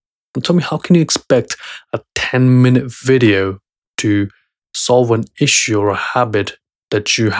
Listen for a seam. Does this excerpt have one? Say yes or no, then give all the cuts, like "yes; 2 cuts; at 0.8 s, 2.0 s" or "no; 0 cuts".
no; 0 cuts